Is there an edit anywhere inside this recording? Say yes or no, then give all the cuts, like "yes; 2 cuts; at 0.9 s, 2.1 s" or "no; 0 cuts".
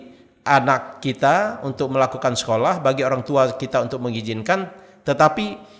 no; 0 cuts